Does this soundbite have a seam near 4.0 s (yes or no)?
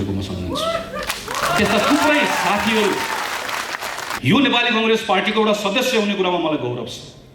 yes